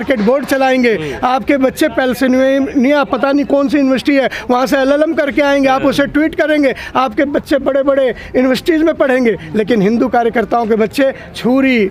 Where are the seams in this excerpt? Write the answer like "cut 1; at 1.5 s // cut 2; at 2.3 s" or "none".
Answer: none